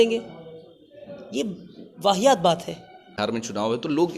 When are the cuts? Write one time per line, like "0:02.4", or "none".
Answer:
0:03.2